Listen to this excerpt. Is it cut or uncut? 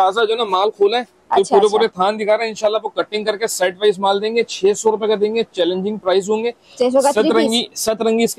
uncut